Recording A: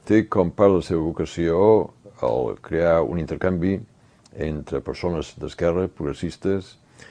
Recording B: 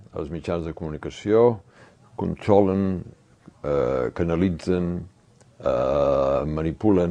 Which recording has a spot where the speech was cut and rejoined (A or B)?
A